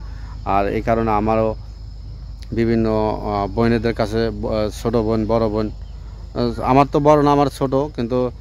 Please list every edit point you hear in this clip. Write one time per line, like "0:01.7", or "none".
none